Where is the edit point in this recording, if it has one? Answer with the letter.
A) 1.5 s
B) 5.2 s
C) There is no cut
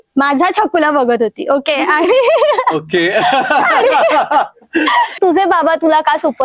B